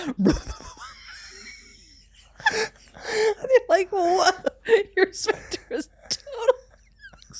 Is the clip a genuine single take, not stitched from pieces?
yes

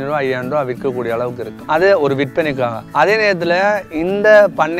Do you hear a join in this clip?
yes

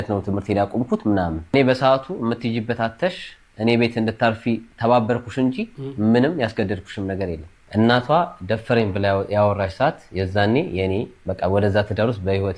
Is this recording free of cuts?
no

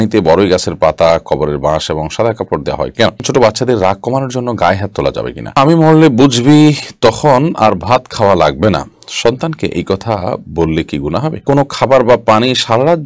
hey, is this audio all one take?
no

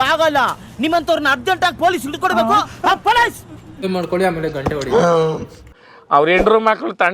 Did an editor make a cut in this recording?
yes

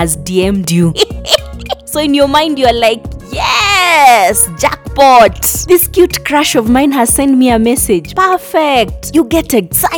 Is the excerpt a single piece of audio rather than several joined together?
yes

